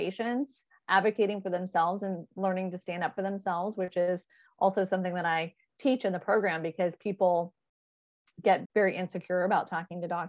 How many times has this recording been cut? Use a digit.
1